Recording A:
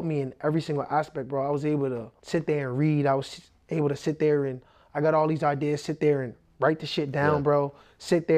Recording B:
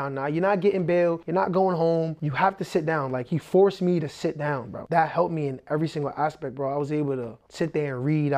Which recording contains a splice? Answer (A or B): B